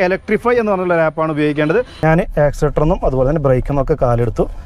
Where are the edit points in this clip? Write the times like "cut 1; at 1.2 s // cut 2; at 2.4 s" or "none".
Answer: cut 1; at 1.9 s